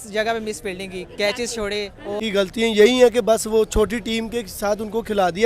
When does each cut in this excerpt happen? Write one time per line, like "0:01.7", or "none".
0:02.2